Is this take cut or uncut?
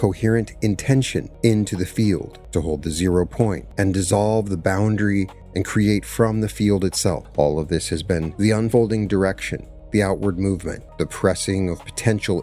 cut